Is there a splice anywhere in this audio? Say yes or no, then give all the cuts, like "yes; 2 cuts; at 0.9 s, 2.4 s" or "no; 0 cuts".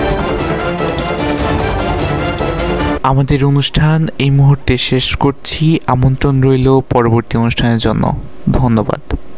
no; 0 cuts